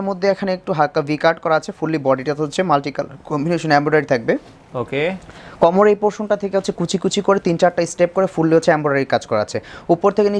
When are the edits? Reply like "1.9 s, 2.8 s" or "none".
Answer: none